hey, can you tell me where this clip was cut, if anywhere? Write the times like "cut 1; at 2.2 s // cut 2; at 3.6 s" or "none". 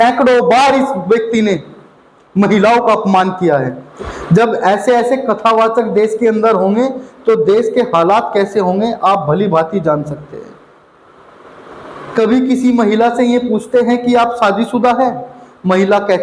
cut 1; at 3.8 s